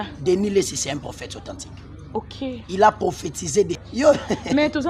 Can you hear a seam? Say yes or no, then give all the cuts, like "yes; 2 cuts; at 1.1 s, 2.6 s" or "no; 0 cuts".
yes; 1 cut; at 3.8 s